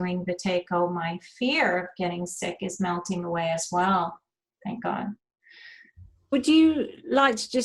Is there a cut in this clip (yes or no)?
no